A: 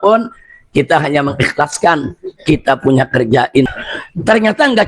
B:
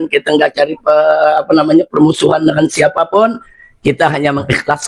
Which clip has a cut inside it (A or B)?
A